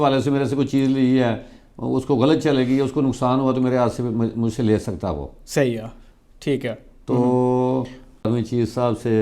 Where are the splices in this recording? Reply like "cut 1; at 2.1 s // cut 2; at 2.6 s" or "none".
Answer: cut 1; at 8.3 s